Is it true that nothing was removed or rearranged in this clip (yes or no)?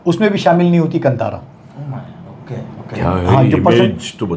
yes